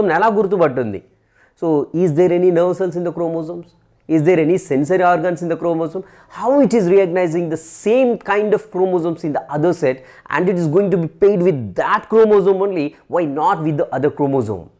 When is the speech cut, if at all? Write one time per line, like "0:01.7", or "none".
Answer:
none